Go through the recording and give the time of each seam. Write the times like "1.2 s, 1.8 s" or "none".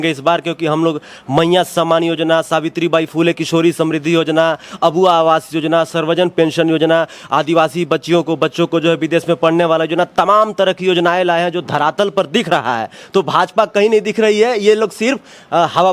none